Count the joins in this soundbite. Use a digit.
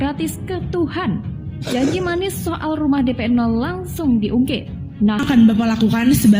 1